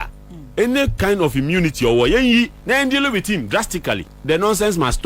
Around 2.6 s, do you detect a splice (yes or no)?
no